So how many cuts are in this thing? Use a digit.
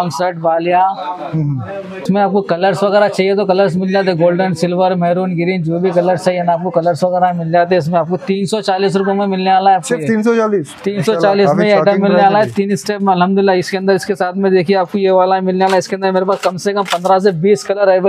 0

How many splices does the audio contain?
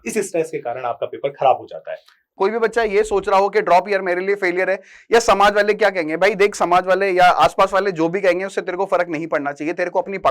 1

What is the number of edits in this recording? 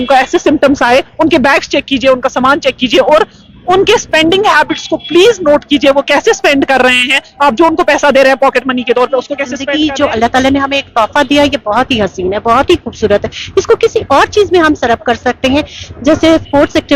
1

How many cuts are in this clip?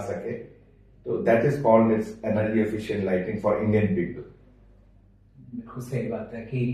0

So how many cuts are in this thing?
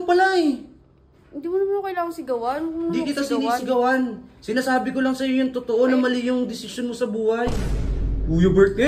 1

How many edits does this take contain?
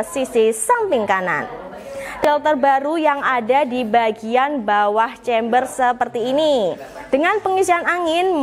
1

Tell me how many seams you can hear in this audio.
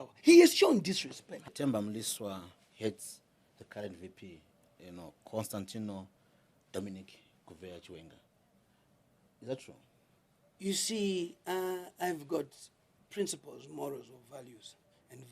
1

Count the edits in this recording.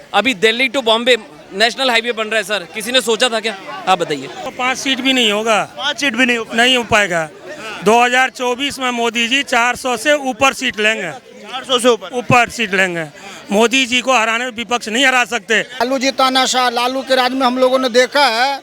2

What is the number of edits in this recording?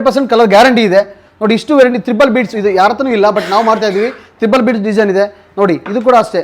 0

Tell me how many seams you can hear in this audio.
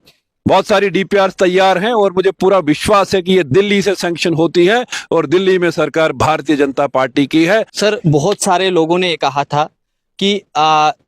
1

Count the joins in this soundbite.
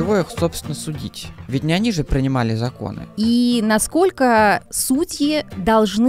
1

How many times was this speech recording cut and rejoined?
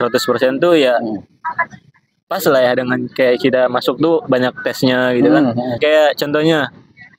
1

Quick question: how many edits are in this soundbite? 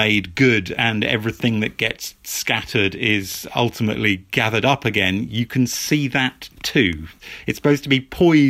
0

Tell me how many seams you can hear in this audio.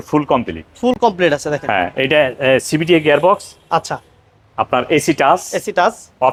0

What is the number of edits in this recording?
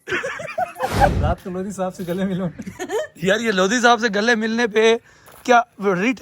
1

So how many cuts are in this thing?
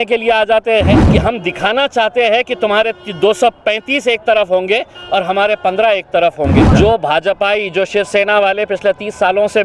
2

